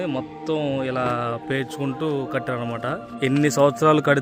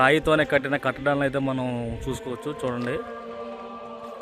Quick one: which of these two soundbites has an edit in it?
first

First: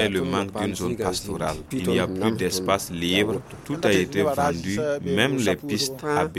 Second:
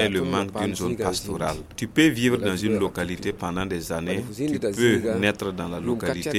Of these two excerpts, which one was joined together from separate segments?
first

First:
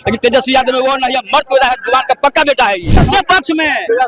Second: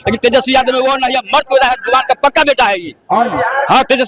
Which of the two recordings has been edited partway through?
first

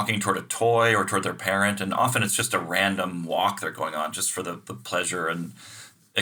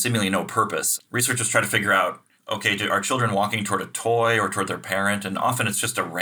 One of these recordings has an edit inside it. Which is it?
second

